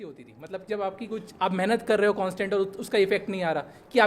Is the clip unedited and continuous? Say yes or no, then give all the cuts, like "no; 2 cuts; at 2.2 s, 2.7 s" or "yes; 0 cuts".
yes; 0 cuts